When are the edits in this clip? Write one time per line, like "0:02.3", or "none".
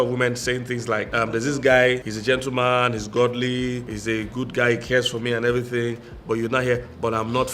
0:01.1
0:02.1
0:03.9